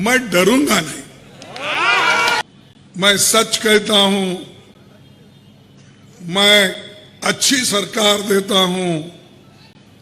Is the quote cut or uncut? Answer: cut